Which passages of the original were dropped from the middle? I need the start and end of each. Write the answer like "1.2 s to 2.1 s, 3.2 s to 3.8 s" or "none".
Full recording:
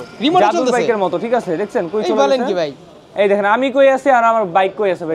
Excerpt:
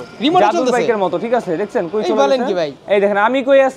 2.8 s to 3.0 s